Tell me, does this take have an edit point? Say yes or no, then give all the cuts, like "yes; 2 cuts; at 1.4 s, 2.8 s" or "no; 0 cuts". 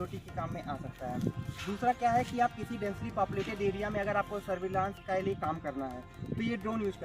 no; 0 cuts